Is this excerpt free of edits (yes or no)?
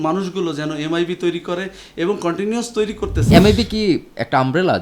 no